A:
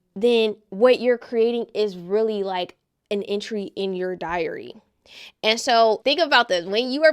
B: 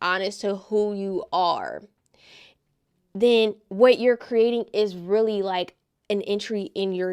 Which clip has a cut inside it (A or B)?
A